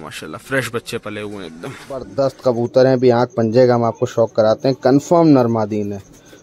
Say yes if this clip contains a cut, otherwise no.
yes